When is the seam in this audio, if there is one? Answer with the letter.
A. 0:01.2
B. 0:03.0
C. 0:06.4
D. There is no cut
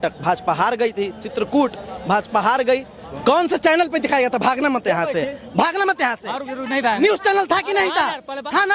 B